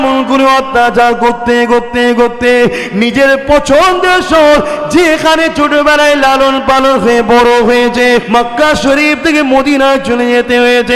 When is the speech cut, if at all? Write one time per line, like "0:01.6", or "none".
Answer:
0:08.2